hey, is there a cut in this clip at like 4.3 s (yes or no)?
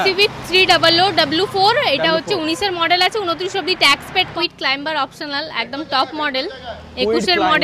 yes